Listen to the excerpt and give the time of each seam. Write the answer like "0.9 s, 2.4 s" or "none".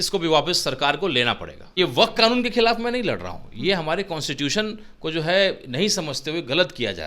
1.7 s